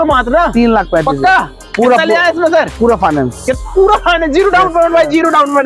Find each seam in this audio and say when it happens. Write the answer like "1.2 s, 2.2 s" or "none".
none